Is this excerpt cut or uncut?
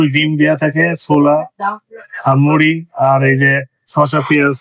uncut